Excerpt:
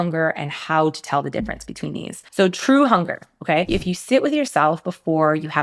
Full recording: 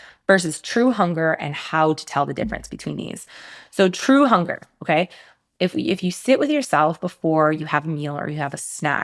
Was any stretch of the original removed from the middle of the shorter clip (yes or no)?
yes